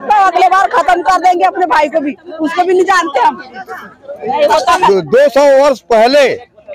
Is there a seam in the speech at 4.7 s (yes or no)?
yes